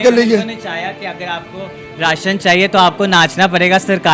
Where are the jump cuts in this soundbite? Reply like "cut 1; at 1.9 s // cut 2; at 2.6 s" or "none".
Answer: none